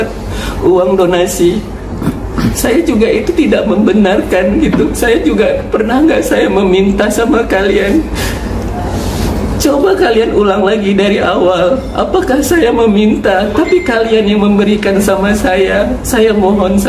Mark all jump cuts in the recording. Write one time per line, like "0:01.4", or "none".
none